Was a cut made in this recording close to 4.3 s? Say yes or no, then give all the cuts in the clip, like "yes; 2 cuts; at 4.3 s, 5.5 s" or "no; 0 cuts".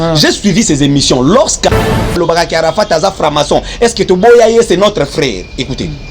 no; 1 cut; at 2.1 s